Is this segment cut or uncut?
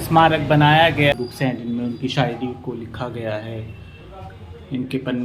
cut